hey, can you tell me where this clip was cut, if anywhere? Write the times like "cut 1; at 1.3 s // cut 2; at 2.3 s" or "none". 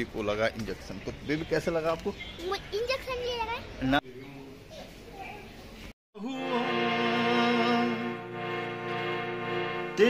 none